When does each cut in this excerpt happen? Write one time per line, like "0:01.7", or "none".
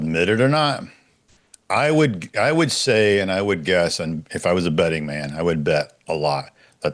none